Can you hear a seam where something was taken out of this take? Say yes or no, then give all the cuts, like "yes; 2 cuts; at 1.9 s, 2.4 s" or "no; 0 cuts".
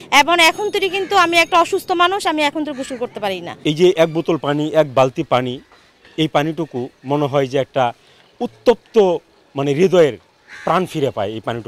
yes; 1 cut; at 3.5 s